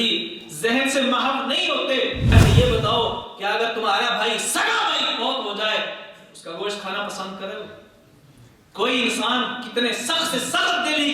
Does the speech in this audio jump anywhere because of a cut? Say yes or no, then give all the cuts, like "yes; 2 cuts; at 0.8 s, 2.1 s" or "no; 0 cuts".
yes; 1 cut; at 2.3 s